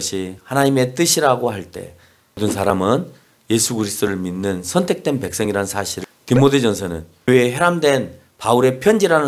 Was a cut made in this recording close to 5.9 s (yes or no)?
yes